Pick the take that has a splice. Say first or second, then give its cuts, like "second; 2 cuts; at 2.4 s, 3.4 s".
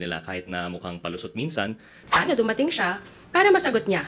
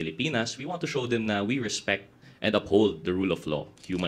first; 1 cut; at 2.0 s